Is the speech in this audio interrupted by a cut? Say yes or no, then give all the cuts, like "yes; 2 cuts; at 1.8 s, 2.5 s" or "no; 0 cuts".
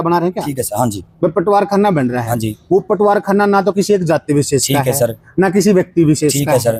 no; 0 cuts